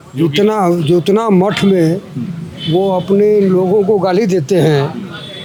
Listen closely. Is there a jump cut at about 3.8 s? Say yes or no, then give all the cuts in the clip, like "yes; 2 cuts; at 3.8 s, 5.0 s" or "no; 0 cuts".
no; 0 cuts